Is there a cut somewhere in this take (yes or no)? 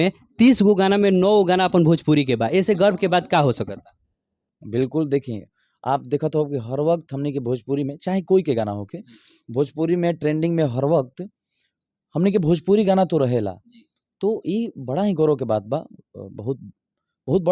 no